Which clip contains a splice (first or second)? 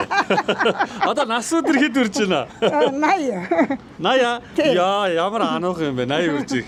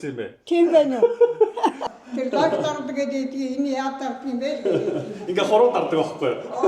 second